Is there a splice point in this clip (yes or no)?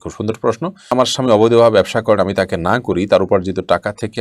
yes